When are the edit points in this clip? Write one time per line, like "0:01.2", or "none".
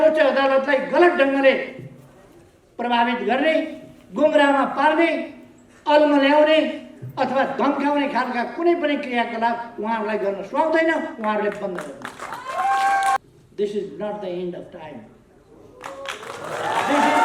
0:13.2

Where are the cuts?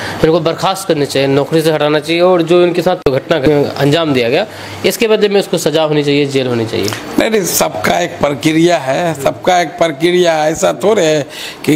none

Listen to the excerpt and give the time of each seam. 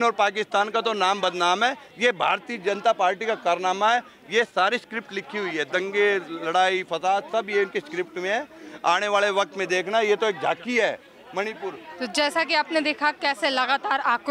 none

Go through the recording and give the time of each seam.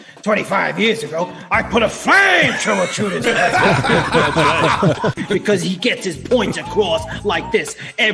0:05.2

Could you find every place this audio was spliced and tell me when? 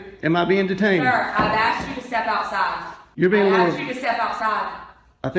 0:03.0

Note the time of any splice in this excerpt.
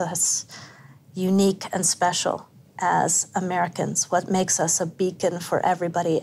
none

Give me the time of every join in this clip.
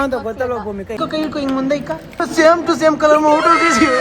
0:01.0

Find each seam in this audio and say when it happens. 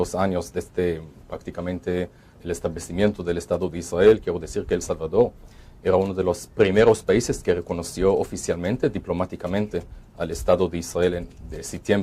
0:02.7

